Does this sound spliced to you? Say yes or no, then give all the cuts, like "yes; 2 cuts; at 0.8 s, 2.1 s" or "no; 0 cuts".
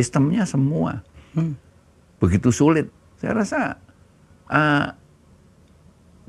yes; 1 cut; at 3.0 s